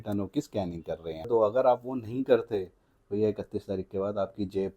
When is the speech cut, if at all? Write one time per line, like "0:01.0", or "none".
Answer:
0:01.3